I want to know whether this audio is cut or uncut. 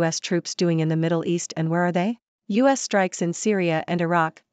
cut